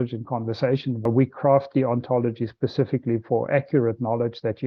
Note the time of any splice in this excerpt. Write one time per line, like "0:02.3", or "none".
0:01.0